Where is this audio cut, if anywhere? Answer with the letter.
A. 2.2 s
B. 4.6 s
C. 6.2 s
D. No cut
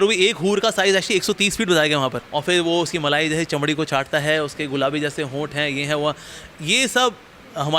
A